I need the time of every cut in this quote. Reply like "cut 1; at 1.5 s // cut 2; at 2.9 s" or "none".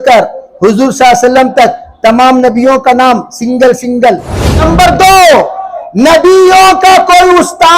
cut 1; at 4.5 s